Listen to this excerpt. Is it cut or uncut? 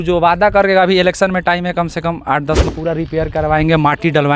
cut